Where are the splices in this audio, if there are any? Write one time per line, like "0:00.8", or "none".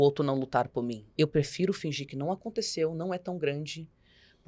0:01.0